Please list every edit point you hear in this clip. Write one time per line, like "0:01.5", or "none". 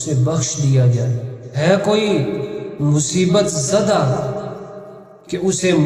0:01.6